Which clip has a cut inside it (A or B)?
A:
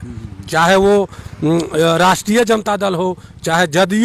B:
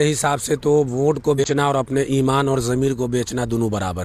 B